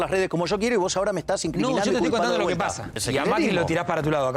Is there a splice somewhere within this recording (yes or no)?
yes